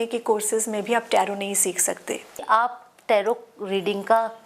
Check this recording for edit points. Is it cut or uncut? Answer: cut